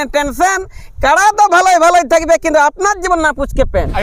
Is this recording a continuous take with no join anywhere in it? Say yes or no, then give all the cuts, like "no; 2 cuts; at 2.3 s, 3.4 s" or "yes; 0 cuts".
yes; 0 cuts